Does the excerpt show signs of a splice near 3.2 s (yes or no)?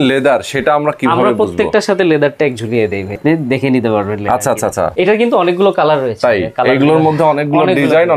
yes